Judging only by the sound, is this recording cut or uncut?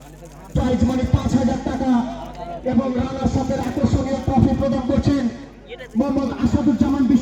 uncut